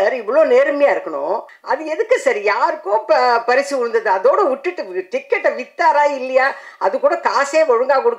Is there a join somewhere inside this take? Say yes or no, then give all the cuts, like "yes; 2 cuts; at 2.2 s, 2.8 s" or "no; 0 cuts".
yes; 1 cut; at 1.5 s